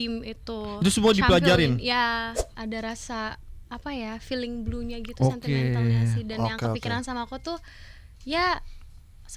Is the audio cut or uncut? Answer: cut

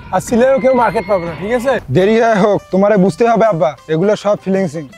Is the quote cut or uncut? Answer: cut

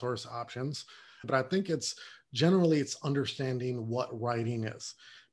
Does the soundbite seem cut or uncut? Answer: cut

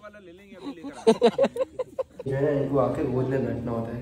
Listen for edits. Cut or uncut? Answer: cut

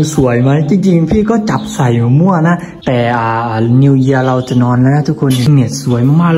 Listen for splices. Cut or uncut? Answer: cut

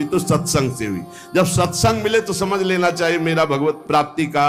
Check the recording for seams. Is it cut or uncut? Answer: uncut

